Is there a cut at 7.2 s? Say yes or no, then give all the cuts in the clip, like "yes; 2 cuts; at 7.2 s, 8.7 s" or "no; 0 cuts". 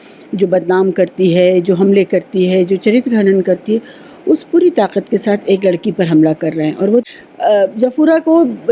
yes; 1 cut; at 7.2 s